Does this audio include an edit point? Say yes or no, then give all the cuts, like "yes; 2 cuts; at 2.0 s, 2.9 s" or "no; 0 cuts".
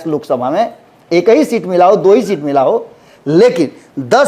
no; 0 cuts